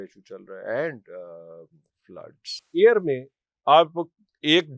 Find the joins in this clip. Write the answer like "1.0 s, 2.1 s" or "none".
2.6 s